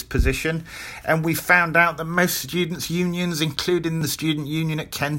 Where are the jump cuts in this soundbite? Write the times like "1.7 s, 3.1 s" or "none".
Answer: 4.1 s